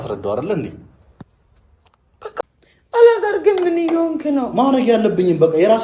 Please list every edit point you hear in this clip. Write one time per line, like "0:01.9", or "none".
0:02.4